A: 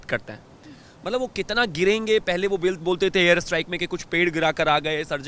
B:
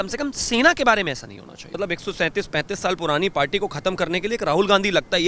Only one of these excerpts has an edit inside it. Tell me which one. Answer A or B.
B